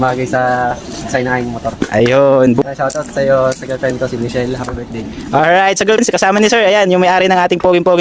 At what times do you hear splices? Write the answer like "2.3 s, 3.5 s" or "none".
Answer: 2.6 s, 6.0 s